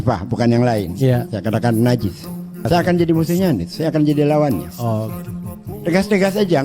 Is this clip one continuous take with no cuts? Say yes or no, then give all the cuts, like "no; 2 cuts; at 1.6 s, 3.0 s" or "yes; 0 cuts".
no; 1 cut; at 2.7 s